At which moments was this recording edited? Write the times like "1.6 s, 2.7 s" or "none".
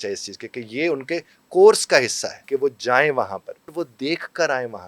2.3 s, 3.7 s